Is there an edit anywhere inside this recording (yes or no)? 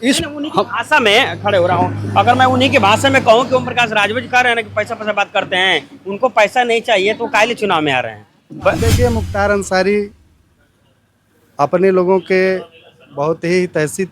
yes